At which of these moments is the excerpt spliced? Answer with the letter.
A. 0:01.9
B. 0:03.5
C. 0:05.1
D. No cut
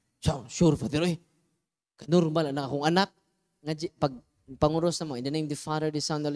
B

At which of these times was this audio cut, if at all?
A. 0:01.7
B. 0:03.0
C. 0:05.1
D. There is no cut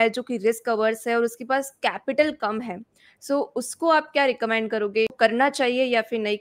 C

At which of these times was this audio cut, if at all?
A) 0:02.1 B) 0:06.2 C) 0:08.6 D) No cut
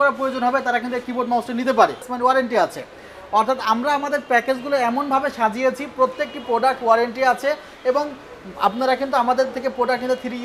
A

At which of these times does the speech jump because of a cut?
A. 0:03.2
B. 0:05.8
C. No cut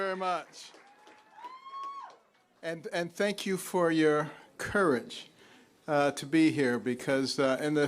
C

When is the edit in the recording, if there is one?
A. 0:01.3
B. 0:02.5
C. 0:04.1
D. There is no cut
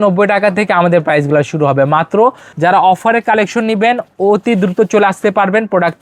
B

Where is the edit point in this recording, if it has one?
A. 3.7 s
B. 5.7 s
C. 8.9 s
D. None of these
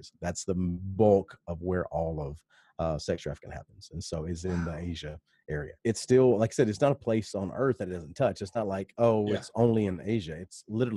B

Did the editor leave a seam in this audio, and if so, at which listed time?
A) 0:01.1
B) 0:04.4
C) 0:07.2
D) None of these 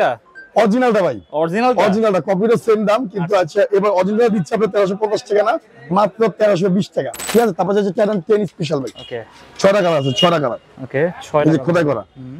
C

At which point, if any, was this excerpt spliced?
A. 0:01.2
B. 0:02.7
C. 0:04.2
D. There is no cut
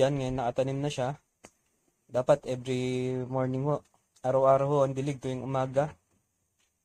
D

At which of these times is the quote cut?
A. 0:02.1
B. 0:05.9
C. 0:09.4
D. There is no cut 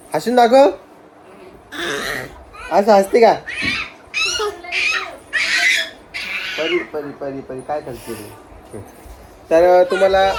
D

